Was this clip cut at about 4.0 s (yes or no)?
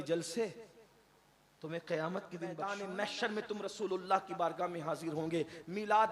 no